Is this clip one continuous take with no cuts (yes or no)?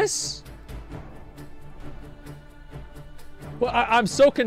no